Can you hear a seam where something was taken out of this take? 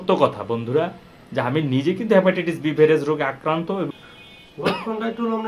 yes; 1 cut; at 3.9 s

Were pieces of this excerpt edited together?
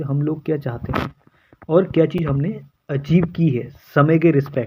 no; 0 cuts

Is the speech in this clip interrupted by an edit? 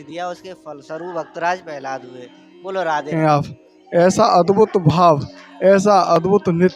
yes; 1 cut; at 3.1 s

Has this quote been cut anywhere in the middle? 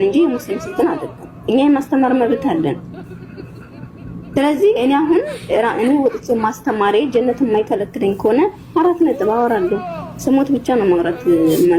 no; 0 cuts

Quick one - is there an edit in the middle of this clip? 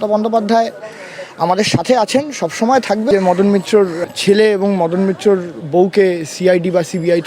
yes; 2 cuts; at 3.1 s, 4.0 s

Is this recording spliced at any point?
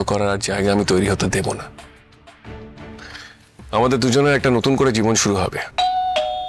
no; 0 cuts

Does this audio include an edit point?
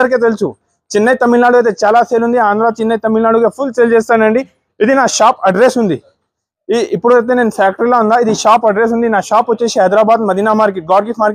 no; 0 cuts

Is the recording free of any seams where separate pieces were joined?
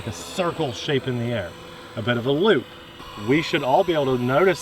no; 1 cut; at 3.1 s

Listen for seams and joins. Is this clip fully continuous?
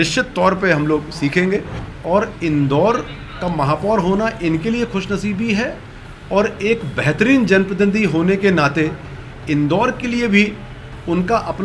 no; 1 cut; at 1.8 s

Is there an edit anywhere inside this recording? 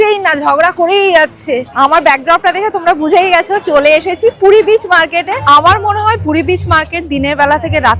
yes; 2 cuts; at 1.7 s, 5.4 s

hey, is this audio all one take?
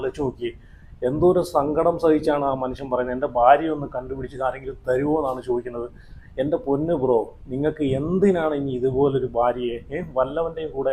yes; 0 cuts

